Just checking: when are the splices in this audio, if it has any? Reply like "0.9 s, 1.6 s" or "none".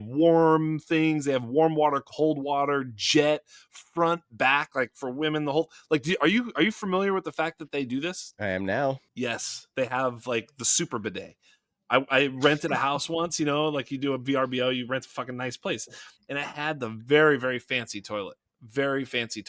8.3 s, 9.1 s, 16.1 s